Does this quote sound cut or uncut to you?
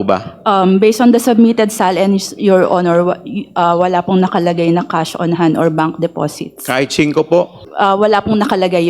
cut